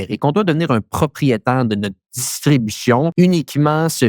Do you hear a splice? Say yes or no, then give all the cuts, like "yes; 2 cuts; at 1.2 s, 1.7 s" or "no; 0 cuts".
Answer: yes; 1 cut; at 3.1 s